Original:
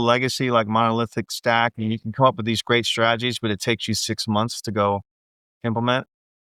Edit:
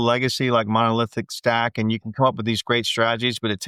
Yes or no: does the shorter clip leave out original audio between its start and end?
no